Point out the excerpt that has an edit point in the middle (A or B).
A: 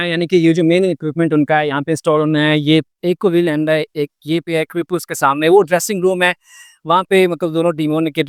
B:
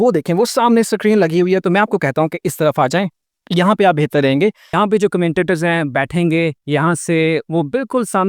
B